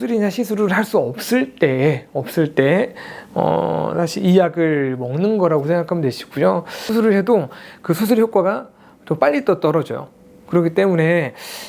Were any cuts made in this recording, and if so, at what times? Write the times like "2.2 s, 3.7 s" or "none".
6.9 s

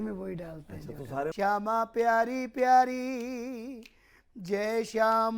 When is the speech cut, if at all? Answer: 1.3 s

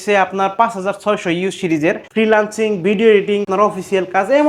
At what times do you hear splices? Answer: 2.0 s, 3.5 s

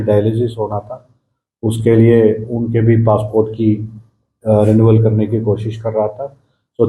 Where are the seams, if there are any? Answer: none

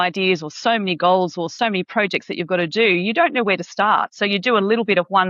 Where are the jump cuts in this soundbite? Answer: 1.5 s

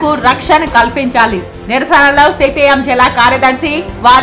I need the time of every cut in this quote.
none

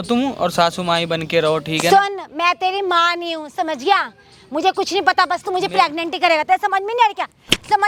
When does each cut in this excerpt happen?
none

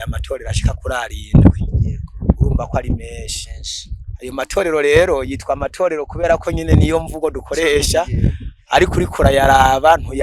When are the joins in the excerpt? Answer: none

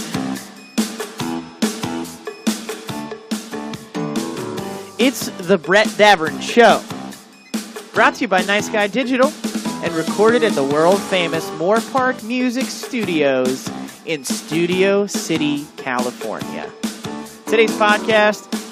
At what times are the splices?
10.1 s

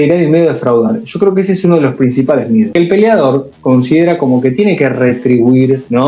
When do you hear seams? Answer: 2.7 s

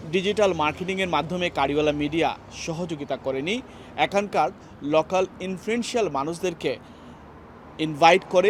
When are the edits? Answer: none

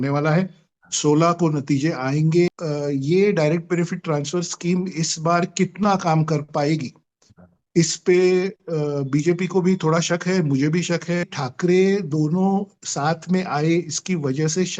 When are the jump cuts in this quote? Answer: 2.5 s, 11.3 s

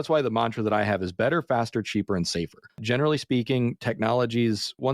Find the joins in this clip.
2.8 s

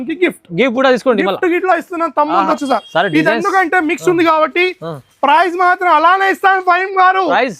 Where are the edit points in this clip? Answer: 2.5 s

